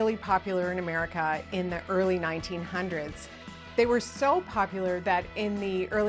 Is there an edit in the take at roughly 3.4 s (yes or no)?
no